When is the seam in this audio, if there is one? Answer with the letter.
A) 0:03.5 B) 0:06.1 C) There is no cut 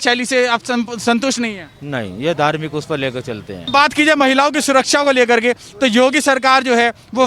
A